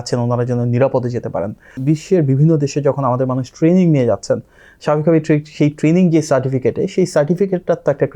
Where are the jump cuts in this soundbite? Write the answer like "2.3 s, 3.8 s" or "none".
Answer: 1.7 s